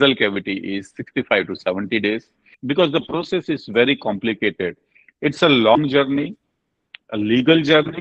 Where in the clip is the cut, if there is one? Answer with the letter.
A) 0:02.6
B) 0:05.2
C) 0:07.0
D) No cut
A